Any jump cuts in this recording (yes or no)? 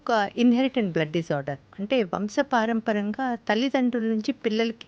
no